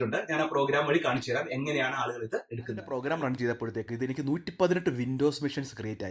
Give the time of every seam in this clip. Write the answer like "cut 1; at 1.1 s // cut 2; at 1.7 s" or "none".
cut 1; at 2.9 s